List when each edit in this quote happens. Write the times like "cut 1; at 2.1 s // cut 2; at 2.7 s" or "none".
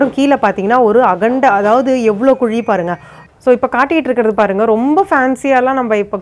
cut 1; at 3.2 s